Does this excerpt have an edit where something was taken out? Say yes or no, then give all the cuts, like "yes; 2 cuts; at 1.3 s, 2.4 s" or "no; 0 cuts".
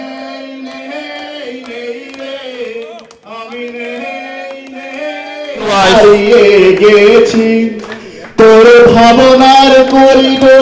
yes; 1 cut; at 5.7 s